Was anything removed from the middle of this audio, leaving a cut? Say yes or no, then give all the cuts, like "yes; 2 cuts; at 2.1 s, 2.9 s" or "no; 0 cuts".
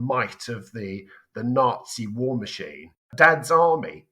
yes; 1 cut; at 3.1 s